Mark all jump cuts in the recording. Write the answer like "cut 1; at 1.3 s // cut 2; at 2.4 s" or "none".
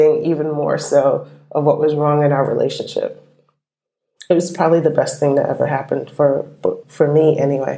cut 1; at 6.8 s